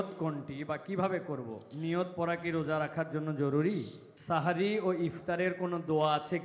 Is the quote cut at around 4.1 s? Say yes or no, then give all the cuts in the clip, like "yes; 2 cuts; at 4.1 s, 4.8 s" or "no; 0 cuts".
yes; 1 cut; at 4.1 s